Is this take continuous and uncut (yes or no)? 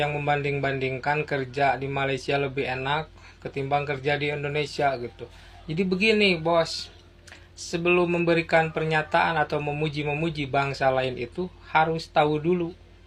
yes